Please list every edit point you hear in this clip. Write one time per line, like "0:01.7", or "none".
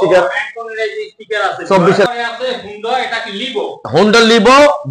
0:02.1